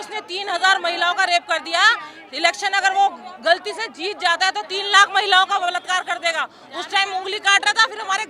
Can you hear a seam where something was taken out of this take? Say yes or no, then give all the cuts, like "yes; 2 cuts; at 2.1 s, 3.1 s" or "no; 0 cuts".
no; 0 cuts